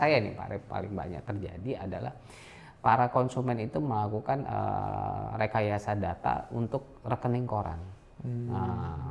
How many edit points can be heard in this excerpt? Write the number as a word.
zero